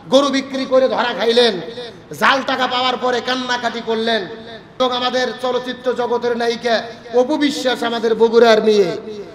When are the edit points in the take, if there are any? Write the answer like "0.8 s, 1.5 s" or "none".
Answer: 4.8 s